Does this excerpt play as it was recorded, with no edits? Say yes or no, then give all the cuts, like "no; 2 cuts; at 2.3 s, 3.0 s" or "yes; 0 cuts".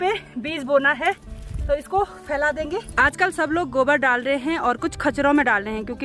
yes; 0 cuts